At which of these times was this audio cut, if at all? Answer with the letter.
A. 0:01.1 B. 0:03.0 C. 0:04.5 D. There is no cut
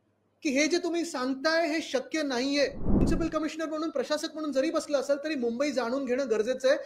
B